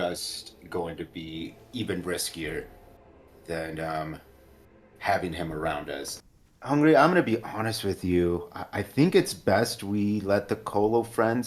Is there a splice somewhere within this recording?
yes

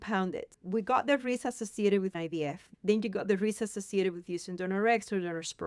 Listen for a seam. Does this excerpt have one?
yes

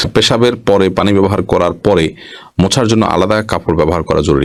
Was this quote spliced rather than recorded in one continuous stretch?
no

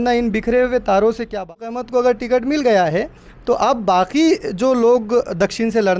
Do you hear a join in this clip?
yes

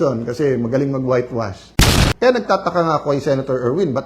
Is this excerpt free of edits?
no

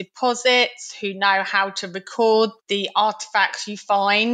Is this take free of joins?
no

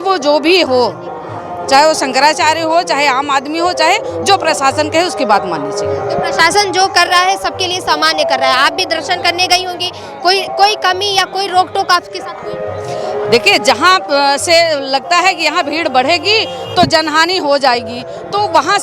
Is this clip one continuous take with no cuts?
yes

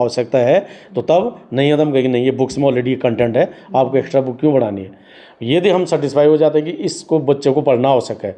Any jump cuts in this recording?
no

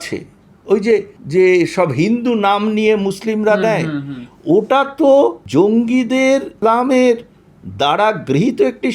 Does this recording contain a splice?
yes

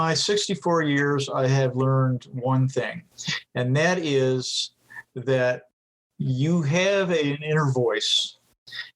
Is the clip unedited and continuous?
no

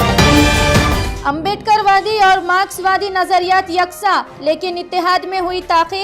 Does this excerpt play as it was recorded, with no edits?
no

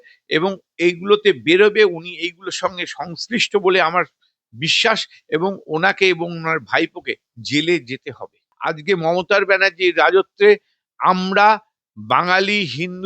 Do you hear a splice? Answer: yes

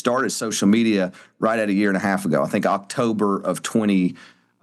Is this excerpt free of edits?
yes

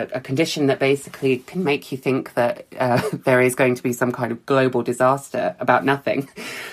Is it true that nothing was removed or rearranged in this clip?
yes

